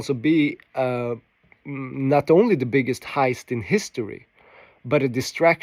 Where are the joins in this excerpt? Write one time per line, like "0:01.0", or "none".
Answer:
none